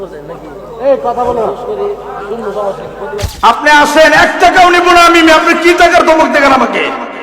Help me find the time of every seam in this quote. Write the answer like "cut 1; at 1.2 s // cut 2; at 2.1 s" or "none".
cut 1; at 3.3 s